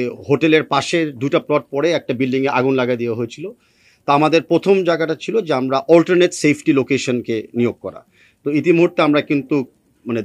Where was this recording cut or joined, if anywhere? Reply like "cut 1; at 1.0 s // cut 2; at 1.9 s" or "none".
none